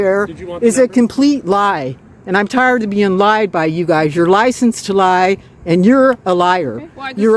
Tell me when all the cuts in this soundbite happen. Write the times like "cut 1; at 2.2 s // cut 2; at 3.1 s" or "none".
none